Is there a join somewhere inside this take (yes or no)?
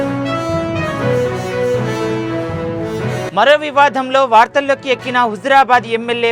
yes